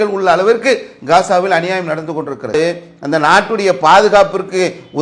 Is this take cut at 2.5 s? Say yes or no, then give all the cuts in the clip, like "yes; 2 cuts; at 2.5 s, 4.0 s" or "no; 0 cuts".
yes; 1 cut; at 2.5 s